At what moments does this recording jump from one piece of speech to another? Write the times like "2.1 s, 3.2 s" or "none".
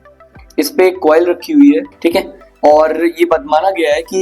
1.9 s